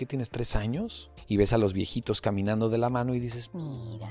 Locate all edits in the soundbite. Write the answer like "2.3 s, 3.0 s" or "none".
1.1 s